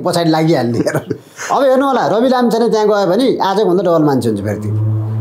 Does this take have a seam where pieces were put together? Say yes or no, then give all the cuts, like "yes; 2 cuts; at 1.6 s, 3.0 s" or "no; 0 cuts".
no; 0 cuts